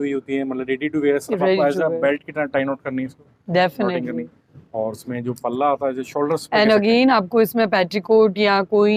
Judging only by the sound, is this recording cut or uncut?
uncut